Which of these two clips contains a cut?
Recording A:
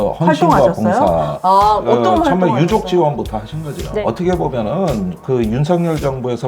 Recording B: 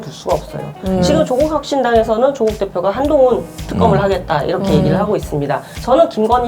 A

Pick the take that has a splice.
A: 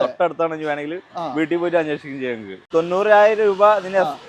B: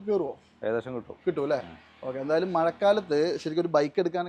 A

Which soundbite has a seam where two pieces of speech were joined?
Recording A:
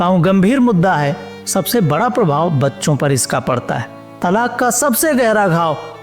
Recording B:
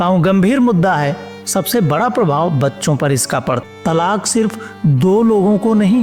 B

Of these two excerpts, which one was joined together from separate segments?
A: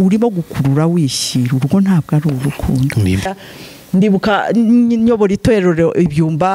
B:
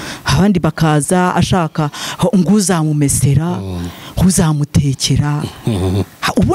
A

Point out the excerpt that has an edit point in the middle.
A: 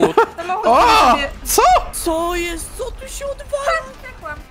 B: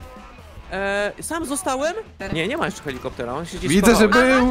B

